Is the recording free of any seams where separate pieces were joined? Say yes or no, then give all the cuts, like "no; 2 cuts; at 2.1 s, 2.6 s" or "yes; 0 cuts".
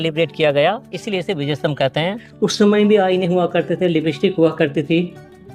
no; 1 cut; at 2.2 s